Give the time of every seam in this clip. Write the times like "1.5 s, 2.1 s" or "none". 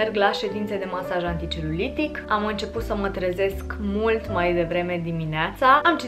none